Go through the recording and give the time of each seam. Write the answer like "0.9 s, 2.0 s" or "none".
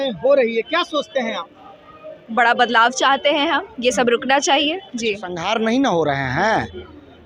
5.3 s